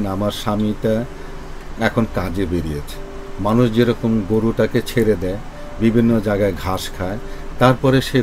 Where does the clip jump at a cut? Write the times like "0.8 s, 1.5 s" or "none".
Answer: none